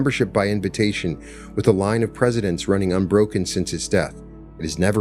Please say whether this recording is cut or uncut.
uncut